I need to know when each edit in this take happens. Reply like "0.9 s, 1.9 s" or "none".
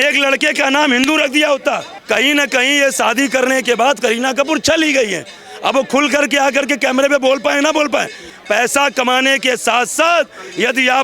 1.9 s, 8.3 s